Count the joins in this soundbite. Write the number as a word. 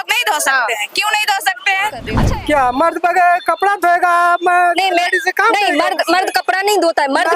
one